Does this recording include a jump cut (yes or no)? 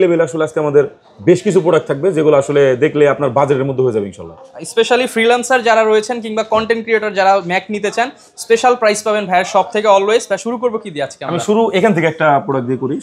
no